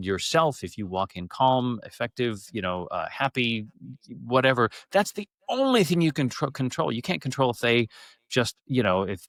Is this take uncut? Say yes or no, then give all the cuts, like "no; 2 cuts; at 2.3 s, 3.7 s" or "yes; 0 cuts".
yes; 0 cuts